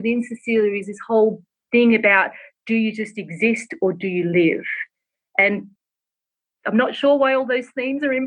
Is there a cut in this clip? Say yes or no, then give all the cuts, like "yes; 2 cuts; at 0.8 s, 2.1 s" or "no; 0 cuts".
no; 0 cuts